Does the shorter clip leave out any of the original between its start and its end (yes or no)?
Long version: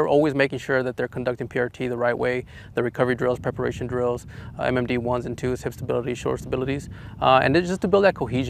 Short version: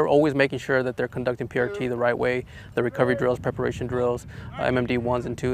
no